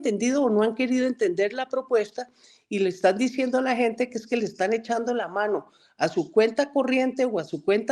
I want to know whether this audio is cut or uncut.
uncut